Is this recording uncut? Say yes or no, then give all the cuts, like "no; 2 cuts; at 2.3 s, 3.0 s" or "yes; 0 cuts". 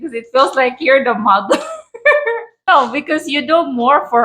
no; 1 cut; at 2.7 s